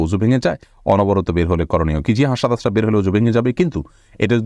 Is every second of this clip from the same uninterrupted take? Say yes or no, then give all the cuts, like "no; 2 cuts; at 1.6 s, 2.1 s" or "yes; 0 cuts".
yes; 0 cuts